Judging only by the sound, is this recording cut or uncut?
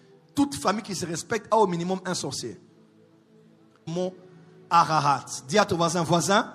cut